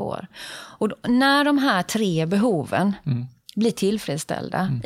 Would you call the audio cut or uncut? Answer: uncut